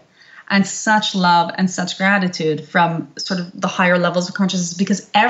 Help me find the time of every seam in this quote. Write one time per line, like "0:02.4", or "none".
none